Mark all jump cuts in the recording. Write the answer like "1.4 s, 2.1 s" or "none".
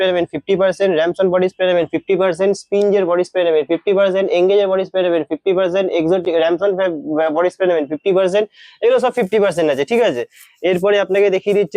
none